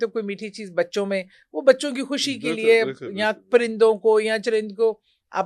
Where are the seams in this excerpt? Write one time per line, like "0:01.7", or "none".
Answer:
none